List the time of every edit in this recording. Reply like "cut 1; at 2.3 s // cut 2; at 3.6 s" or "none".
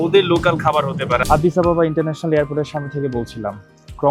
cut 1; at 1.2 s